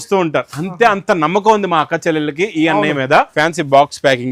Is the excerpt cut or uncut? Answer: cut